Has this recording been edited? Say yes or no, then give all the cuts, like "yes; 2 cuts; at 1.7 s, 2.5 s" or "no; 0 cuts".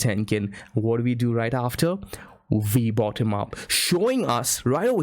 yes; 1 cut; at 3.7 s